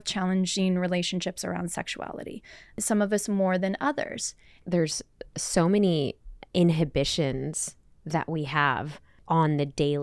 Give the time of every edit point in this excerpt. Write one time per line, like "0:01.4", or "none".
0:02.8
0:04.6
0:09.1

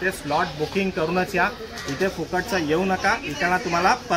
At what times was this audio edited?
none

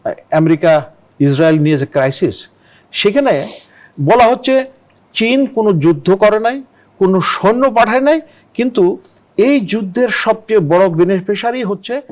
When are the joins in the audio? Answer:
none

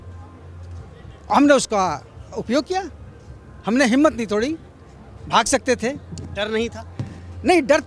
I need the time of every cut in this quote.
none

